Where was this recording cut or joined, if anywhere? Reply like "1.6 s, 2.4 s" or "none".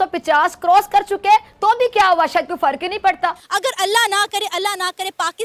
3.4 s